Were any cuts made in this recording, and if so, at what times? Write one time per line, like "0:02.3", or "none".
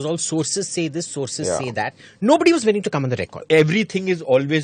0:03.3